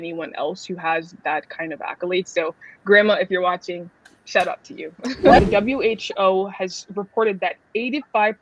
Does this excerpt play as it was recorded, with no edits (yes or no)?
no